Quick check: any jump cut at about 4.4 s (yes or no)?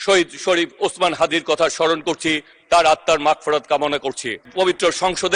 yes